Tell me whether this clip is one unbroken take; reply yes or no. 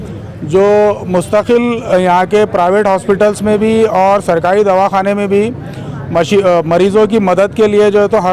yes